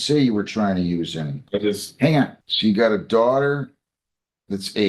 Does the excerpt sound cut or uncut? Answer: cut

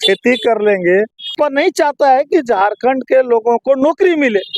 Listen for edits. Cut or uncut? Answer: cut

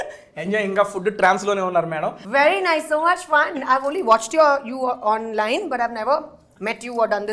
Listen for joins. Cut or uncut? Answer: cut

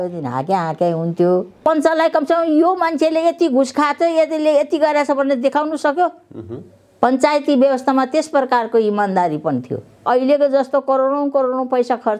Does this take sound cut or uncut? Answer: cut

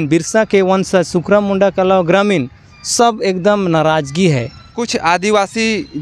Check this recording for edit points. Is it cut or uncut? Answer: cut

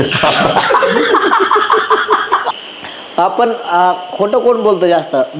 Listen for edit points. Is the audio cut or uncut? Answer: cut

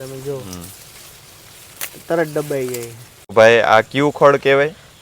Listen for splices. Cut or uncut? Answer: cut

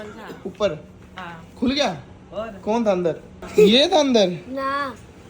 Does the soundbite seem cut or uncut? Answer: cut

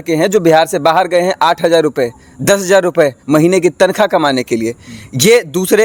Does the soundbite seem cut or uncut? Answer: uncut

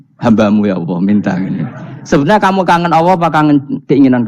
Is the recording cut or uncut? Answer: uncut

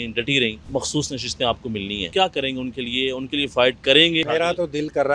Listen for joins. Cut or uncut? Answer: cut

